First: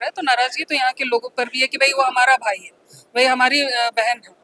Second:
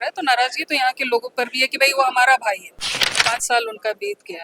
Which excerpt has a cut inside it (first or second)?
second